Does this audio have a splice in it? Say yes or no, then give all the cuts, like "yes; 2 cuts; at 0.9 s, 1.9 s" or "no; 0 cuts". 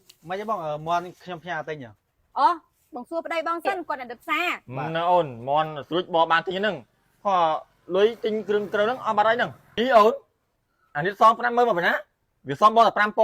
yes; 2 cuts; at 4.7 s, 9.6 s